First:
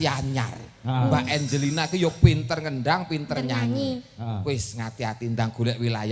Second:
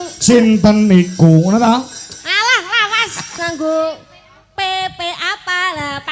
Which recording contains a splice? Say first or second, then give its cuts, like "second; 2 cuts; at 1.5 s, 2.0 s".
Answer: second; 1 cut; at 3.3 s